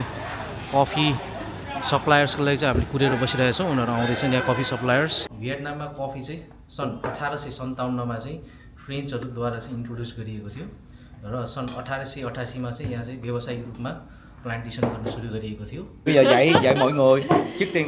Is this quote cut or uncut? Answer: cut